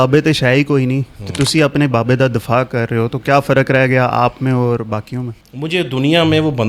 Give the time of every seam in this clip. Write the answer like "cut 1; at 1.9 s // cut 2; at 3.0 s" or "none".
cut 1; at 5.4 s